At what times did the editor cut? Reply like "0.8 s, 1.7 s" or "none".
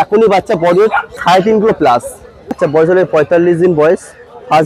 1.1 s, 2.6 s